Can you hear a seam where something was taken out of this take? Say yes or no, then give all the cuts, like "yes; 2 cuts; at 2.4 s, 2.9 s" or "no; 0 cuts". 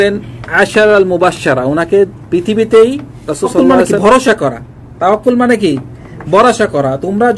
yes; 1 cut; at 3.5 s